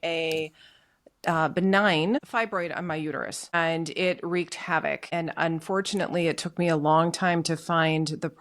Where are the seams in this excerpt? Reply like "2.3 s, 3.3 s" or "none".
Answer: 2.3 s, 3.5 s, 5.1 s